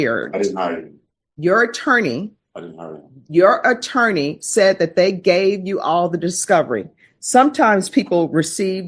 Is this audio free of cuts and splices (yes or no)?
yes